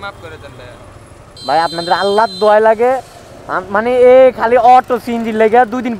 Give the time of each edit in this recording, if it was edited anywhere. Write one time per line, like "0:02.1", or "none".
0:01.3